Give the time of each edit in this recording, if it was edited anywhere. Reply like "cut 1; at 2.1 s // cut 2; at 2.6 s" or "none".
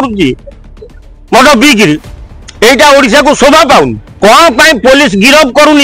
none